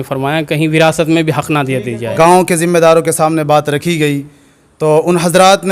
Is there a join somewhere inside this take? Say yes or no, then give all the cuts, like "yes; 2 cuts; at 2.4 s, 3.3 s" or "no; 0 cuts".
yes; 1 cut; at 2.0 s